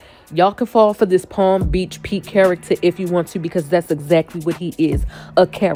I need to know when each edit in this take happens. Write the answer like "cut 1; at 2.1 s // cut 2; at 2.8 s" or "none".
none